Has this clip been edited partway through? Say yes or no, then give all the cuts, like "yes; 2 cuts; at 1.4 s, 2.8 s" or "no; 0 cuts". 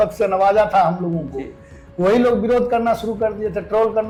no; 0 cuts